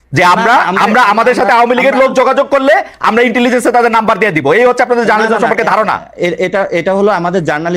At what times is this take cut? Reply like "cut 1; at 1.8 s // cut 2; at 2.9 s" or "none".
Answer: none